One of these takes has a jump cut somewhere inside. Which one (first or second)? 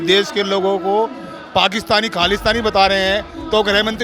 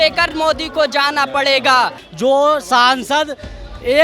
second